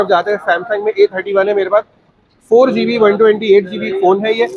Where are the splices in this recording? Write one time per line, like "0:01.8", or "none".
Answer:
none